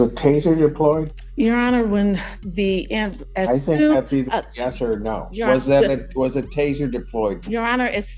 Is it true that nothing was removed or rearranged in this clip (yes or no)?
no